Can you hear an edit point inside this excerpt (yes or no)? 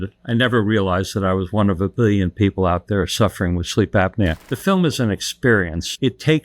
yes